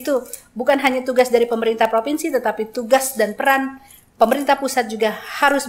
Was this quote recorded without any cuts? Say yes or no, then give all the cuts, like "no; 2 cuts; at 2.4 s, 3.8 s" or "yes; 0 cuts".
yes; 0 cuts